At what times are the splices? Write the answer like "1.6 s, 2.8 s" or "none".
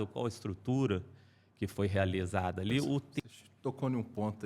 3.1 s